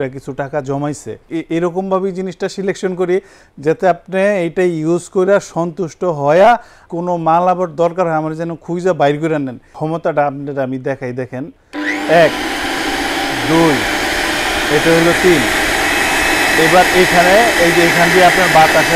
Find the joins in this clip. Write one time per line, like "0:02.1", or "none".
0:01.3
0:06.8
0:09.7
0:11.6